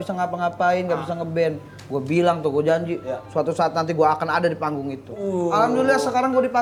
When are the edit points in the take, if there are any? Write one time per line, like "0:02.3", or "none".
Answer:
none